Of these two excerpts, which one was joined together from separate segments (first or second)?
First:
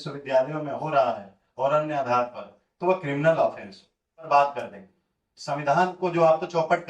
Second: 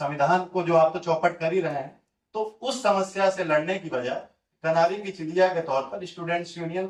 first